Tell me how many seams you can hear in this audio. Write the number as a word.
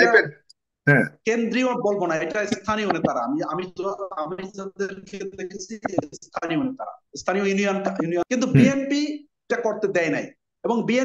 one